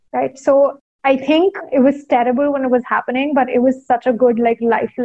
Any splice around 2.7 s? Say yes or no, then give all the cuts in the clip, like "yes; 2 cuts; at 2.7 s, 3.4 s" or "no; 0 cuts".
no; 1 cut; at 1.4 s